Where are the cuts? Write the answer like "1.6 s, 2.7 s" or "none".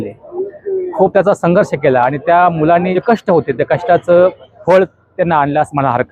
2.9 s, 4.5 s